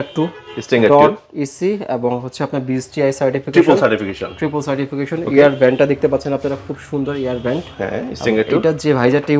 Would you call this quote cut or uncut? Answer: uncut